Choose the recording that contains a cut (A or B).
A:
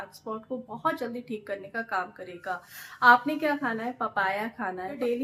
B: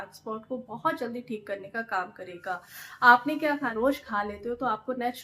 B